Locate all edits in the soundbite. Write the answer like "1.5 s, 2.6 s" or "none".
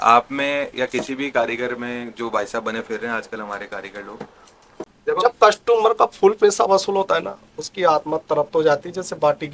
4.9 s